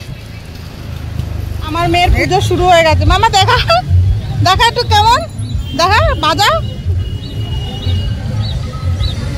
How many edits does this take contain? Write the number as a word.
one